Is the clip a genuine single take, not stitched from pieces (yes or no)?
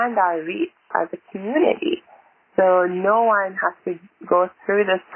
yes